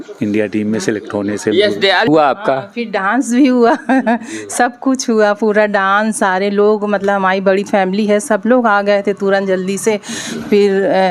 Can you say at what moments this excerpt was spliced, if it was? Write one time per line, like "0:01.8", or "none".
0:02.1